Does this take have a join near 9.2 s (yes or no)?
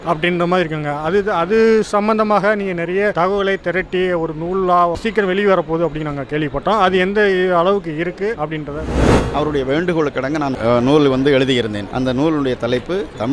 yes